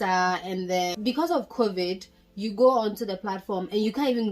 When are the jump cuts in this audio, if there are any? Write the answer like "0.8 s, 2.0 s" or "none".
1.0 s